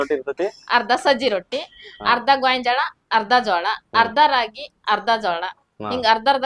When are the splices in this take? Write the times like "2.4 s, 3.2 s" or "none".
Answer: none

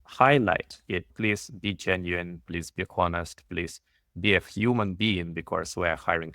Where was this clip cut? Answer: 1.1 s

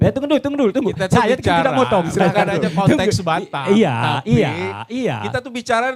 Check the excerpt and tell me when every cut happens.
none

